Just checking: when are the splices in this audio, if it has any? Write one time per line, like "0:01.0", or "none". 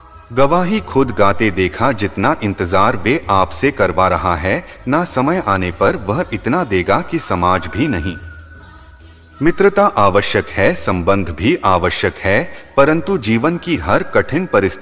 none